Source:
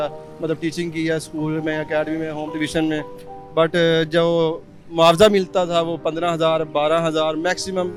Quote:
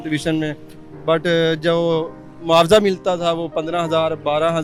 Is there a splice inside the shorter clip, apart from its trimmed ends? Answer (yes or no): no